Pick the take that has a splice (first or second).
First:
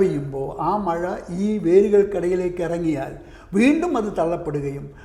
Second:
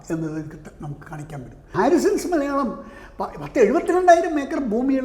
second